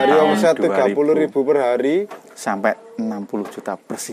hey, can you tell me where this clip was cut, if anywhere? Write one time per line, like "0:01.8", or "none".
none